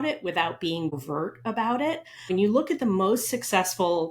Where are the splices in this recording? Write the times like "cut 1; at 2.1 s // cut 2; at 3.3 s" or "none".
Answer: cut 1; at 0.9 s // cut 2; at 2.3 s

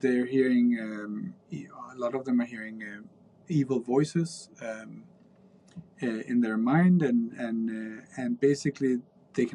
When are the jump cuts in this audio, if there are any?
none

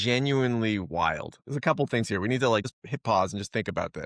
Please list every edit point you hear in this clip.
cut 1; at 2.8 s

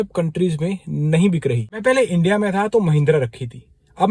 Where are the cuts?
cut 1; at 1.8 s

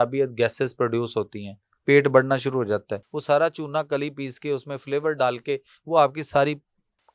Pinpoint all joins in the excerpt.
cut 1; at 3.1 s

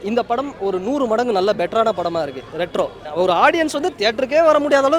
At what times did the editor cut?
cut 1; at 3.1 s

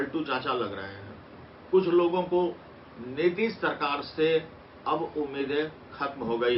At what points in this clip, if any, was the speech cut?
none

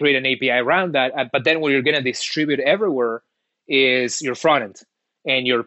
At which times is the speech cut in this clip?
none

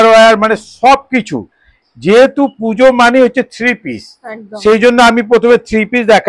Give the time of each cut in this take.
none

